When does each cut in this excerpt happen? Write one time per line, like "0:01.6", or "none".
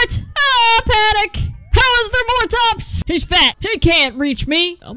0:03.0